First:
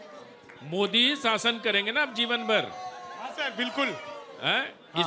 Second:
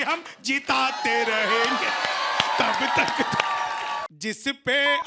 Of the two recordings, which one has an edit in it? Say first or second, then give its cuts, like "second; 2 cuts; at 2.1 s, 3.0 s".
second; 1 cut; at 4.1 s